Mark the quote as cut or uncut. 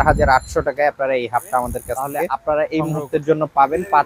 cut